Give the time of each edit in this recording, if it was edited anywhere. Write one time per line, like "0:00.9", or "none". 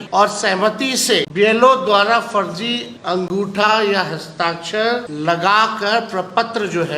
0:01.3
0:02.9
0:05.1

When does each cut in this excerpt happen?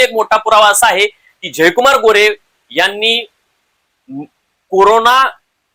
none

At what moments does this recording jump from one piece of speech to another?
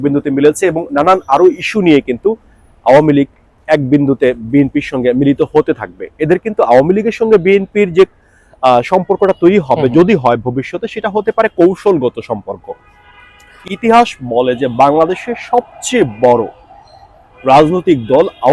0:13.5

